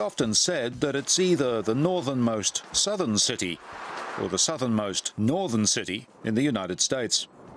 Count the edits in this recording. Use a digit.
1